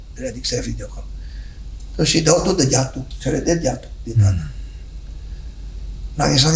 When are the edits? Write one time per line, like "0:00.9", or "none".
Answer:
none